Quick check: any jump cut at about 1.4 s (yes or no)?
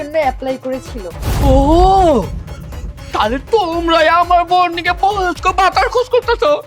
yes